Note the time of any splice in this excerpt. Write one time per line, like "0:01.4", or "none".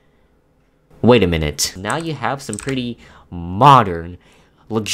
0:01.6